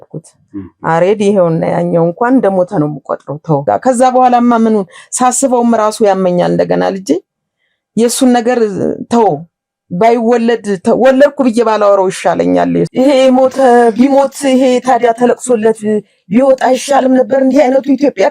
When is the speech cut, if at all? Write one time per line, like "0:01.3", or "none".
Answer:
0:03.6
0:12.9